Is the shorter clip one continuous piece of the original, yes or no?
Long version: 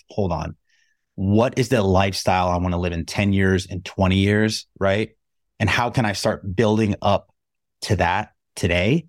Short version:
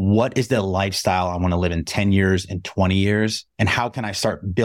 no